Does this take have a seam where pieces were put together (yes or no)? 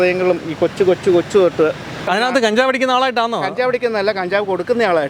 yes